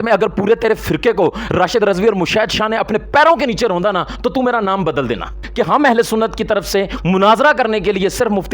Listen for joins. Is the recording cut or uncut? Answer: cut